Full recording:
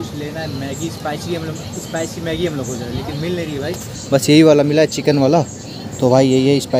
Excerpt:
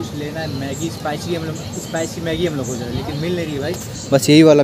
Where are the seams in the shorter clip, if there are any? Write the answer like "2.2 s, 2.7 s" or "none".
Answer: none